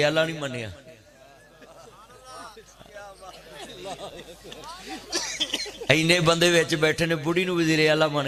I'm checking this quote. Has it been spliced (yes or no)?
no